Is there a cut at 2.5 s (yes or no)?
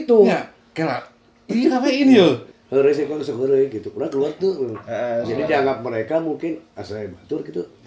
yes